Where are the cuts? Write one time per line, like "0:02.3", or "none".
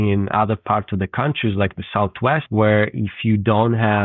0:02.5